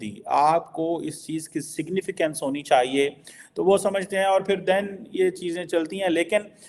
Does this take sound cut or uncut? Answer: uncut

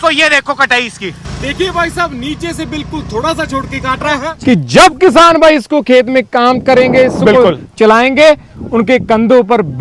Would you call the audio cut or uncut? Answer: cut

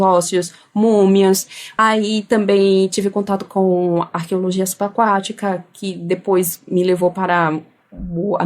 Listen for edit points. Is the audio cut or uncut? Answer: cut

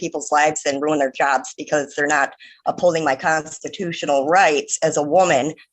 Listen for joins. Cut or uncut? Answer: uncut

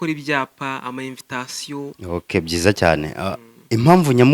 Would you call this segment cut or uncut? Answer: cut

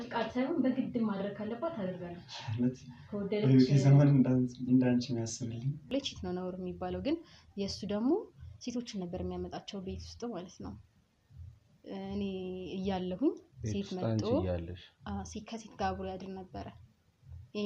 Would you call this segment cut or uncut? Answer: cut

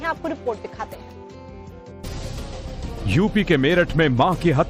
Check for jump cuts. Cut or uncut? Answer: uncut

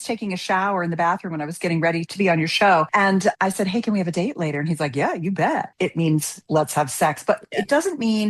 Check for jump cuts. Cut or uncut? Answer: cut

